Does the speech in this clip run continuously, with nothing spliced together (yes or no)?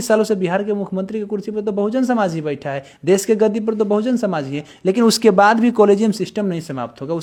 yes